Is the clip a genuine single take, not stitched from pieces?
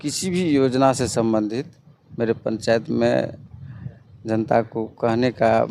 yes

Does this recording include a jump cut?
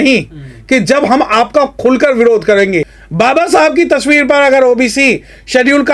yes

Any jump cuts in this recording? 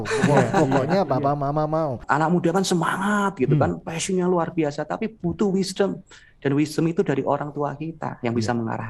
yes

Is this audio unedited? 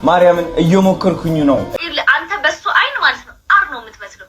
no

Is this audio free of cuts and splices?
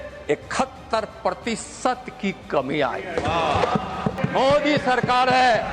no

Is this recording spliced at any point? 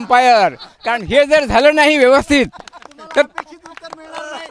no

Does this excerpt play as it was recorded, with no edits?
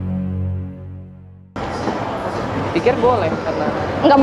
no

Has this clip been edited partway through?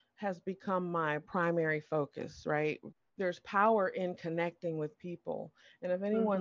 yes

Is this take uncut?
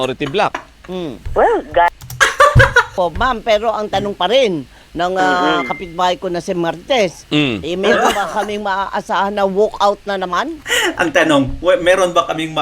no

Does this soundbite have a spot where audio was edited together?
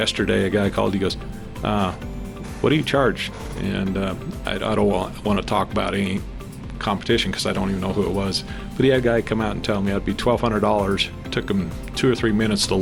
no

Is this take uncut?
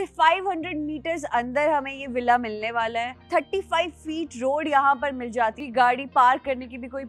no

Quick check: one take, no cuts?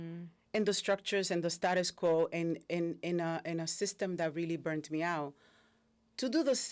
yes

